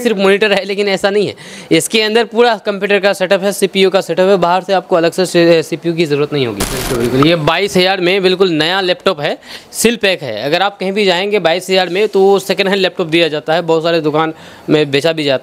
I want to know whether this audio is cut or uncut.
cut